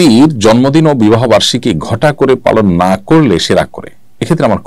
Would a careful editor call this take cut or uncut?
uncut